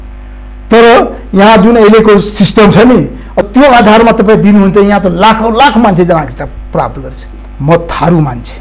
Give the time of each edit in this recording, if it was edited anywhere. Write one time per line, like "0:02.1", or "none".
0:03.4
0:07.3